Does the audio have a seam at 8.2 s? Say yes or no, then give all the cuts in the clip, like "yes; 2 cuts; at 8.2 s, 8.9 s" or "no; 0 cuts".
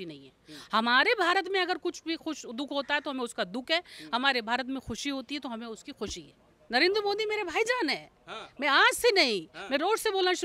no; 1 cut; at 6.6 s